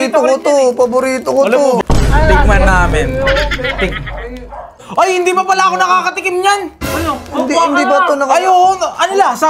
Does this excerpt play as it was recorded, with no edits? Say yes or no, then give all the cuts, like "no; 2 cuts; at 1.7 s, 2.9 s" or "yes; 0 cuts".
no; 2 cuts; at 1.8 s, 4.8 s